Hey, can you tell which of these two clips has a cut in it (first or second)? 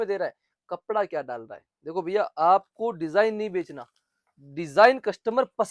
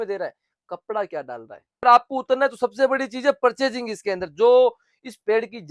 second